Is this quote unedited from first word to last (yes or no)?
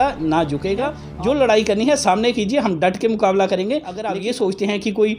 no